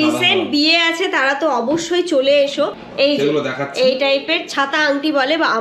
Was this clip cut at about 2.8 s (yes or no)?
yes